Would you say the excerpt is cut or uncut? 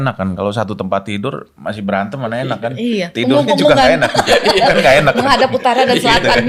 uncut